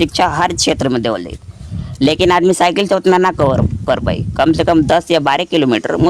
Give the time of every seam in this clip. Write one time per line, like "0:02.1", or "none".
none

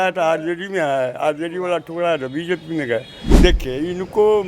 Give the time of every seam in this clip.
0:03.2

